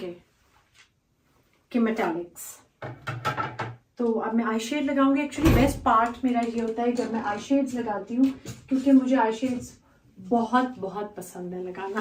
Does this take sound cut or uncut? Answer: uncut